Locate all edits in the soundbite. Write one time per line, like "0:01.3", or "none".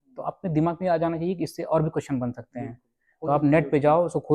none